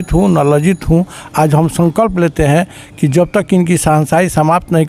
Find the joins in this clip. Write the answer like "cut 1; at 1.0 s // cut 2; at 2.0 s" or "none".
none